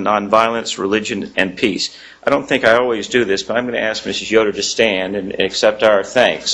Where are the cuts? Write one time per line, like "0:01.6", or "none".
0:04.5